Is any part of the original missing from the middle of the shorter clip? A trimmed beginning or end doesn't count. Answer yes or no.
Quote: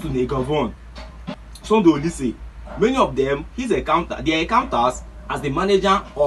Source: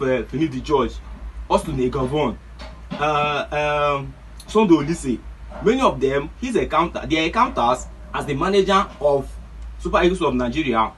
yes